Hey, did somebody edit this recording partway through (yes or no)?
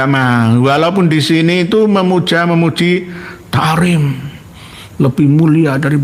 no